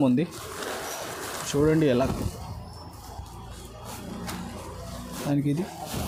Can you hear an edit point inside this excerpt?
no; 0 cuts

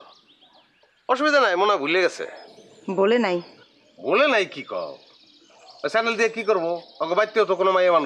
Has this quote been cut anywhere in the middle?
no; 0 cuts

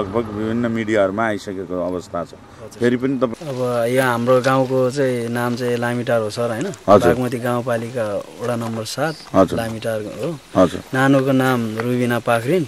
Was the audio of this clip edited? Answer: yes; 1 cut; at 3.3 s

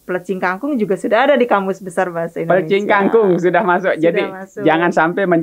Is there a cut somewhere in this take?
no; 0 cuts

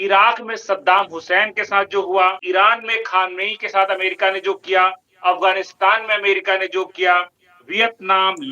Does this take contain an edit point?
yes; 1 cut; at 2.4 s

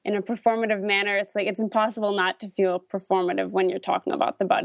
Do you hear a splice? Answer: no; 0 cuts

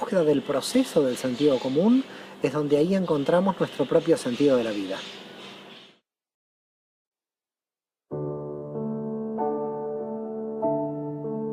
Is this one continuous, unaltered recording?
yes; 0 cuts

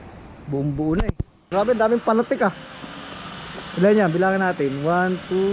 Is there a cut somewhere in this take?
yes; 1 cut; at 1.3 s

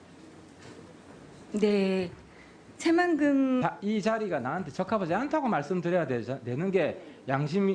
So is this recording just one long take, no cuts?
yes; 0 cuts

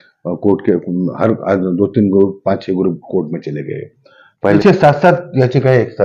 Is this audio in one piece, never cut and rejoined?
no; 1 cut; at 4.6 s

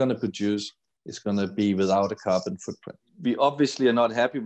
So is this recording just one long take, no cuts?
no; 1 cut; at 3.1 s

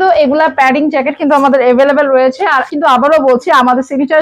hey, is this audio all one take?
yes; 0 cuts

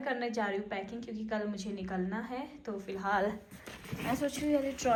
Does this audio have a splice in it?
no; 0 cuts

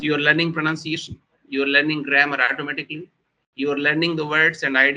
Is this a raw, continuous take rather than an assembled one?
yes; 0 cuts

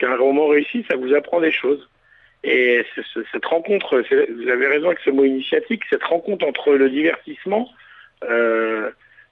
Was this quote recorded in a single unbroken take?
yes; 0 cuts

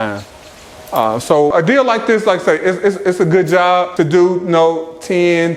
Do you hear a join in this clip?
yes; 2 cuts; at 1.5 s, 3.9 s

